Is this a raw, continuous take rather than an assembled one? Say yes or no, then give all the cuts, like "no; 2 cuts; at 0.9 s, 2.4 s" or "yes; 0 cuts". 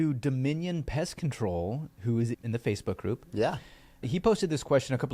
no; 2 cuts; at 2.4 s, 4.0 s